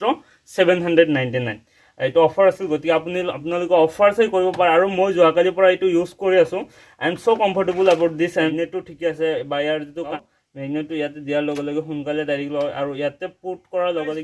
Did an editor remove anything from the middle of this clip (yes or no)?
yes